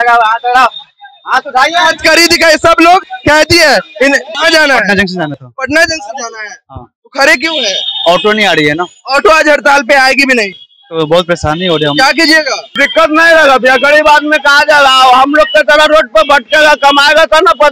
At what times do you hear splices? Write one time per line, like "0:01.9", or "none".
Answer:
0:04.3
0:12.8